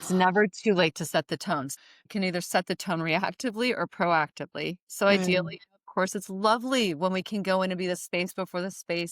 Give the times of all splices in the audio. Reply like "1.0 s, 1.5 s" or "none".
1.7 s